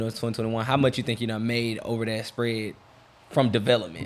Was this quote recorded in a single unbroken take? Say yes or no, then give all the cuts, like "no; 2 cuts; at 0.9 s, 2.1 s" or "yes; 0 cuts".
yes; 0 cuts